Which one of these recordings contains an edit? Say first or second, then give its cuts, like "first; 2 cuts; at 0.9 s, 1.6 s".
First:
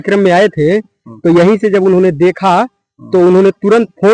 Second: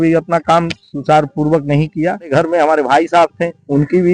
second; 1 cut; at 2.3 s